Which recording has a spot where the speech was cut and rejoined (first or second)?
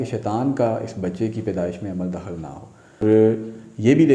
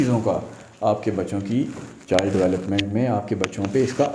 first